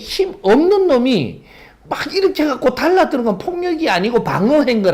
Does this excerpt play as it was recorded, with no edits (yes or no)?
yes